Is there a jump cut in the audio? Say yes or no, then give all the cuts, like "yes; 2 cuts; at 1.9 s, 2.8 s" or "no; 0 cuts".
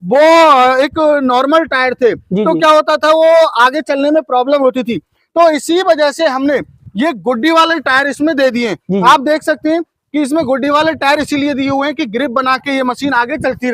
no; 0 cuts